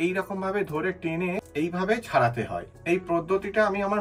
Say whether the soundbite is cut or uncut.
cut